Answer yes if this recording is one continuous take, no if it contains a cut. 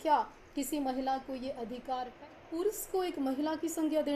no